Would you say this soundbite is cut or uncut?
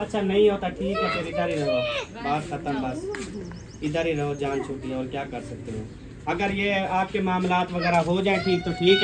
uncut